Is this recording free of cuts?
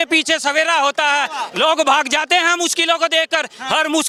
yes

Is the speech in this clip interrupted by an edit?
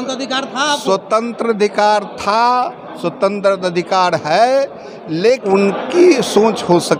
yes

